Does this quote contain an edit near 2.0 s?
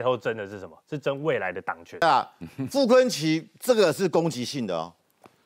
yes; 1 cut; at 2.0 s

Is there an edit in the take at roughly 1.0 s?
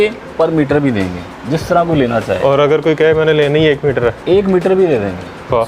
no; 1 cut; at 4.2 s

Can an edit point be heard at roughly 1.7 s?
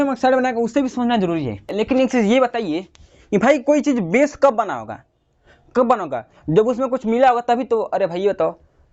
yes; 1 cut; at 1.7 s

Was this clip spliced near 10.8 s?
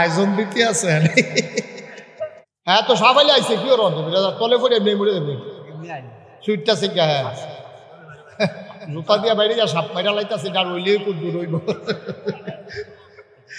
no; 1 cut; at 2.5 s

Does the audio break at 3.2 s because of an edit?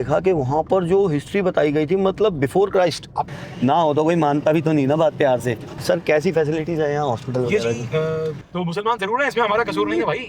yes; 3 cuts; at 3.2 s, 5.7 s, 8.4 s

